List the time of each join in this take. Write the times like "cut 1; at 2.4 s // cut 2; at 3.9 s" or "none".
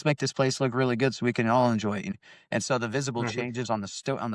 cut 1; at 2.1 s